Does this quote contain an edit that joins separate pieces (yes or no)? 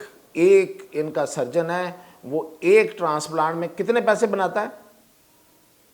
no